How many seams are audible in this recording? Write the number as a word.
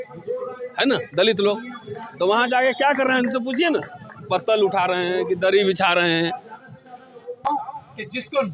one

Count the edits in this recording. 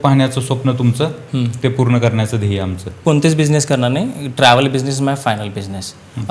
one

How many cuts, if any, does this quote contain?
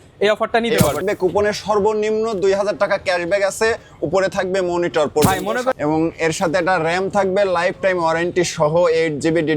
two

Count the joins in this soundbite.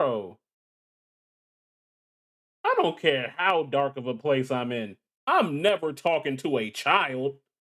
zero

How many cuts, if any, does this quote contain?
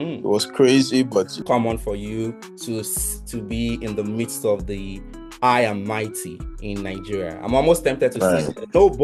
one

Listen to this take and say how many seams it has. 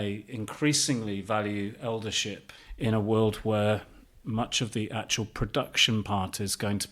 one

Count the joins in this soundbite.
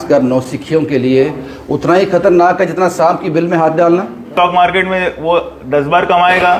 one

